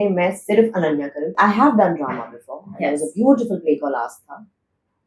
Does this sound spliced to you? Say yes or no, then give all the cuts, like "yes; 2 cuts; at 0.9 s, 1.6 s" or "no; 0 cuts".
yes; 1 cut; at 1.3 s